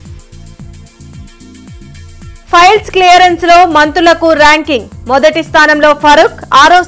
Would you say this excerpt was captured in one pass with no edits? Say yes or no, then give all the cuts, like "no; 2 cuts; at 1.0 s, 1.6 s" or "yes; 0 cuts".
no; 1 cut; at 1.4 s